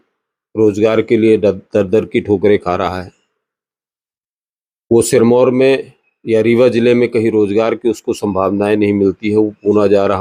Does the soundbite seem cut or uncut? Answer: uncut